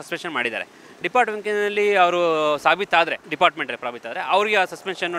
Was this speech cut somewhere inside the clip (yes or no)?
yes